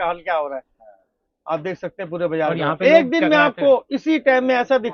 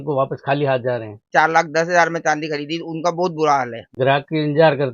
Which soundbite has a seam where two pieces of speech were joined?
second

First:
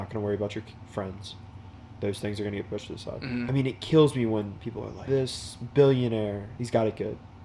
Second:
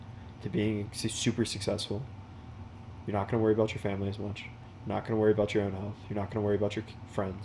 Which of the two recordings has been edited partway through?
first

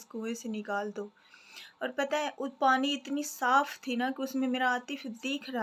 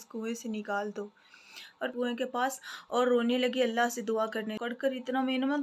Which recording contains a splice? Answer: second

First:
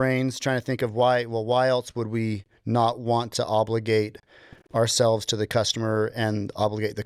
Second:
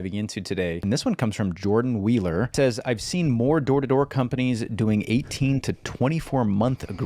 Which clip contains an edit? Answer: second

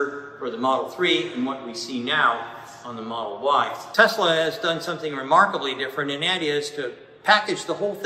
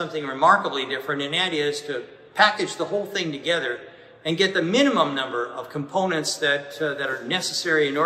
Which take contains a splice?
first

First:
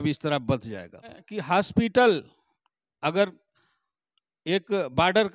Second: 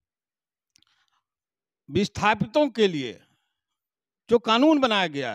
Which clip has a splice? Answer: first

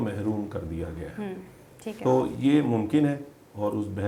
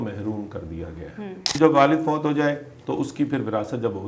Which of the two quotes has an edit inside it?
second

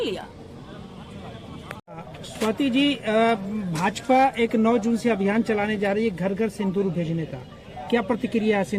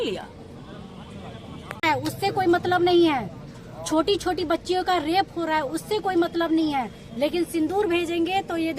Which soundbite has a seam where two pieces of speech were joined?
second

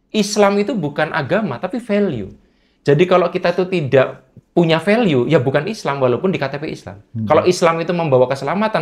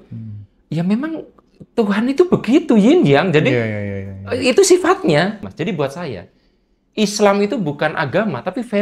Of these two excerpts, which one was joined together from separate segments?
second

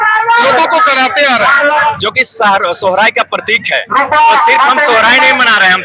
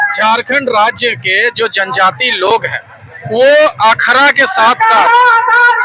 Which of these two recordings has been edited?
first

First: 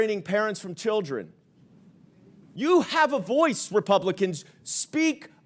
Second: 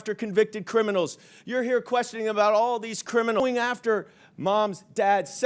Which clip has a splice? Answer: second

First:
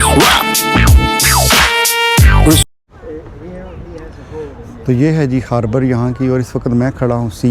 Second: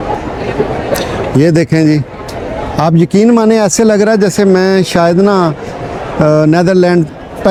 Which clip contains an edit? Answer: first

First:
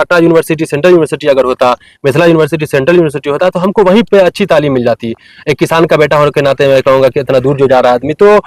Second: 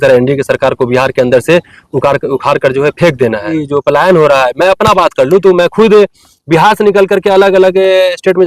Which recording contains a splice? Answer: second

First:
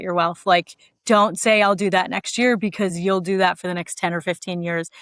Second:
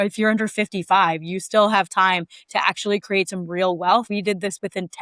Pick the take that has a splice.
second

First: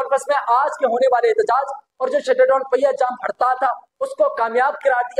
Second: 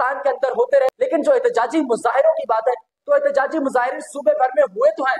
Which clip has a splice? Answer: second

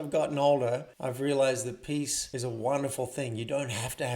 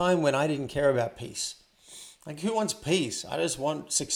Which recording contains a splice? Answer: first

